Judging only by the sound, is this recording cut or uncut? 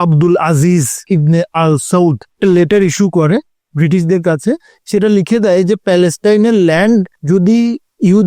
cut